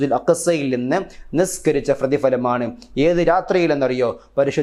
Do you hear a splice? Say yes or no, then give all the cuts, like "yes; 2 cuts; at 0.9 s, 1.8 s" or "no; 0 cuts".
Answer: no; 0 cuts